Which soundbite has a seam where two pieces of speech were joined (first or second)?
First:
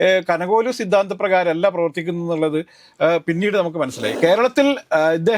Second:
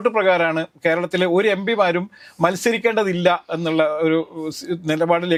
first